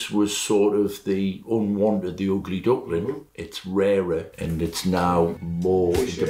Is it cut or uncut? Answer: uncut